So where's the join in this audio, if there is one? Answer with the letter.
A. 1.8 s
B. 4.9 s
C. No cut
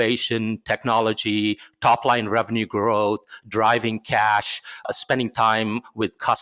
B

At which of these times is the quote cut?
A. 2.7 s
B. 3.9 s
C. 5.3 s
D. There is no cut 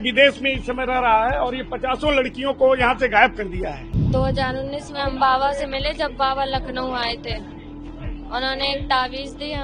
B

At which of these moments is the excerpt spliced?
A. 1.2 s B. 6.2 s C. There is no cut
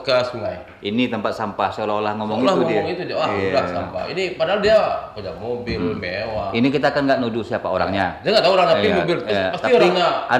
C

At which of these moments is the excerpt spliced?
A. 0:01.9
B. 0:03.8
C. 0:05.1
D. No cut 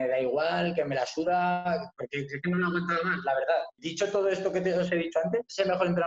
B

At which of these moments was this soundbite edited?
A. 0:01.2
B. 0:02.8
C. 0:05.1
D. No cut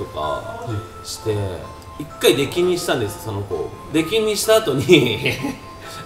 D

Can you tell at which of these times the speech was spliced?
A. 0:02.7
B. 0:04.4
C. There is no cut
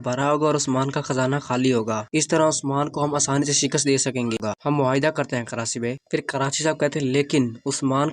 B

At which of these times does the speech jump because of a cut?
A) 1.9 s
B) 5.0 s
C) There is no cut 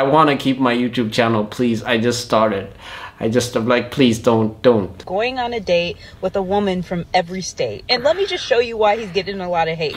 B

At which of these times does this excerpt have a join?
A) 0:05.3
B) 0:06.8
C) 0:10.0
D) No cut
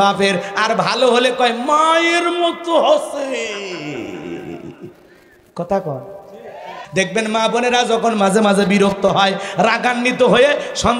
B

